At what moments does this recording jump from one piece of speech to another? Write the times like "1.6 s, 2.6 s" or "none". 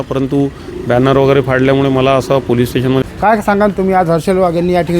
3.1 s